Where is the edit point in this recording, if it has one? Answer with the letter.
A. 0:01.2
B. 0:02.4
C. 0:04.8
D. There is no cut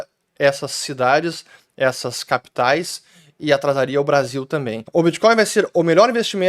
C